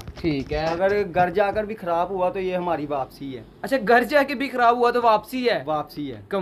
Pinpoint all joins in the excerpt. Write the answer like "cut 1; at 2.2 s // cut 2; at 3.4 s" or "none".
none